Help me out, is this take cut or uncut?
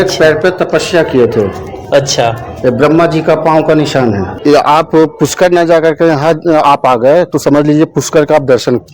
cut